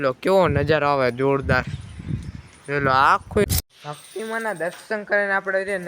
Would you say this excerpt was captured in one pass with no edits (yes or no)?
no